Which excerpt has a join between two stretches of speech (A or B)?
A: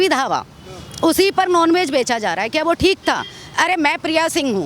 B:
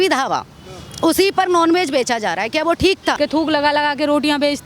B